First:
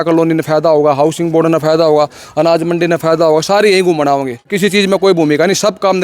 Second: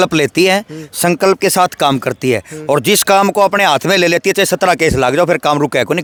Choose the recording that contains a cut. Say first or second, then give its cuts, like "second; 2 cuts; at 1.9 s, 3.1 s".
first; 1 cut; at 4.5 s